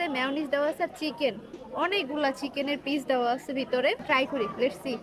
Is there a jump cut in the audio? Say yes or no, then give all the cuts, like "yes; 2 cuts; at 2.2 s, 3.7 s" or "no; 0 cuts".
yes; 1 cut; at 4.0 s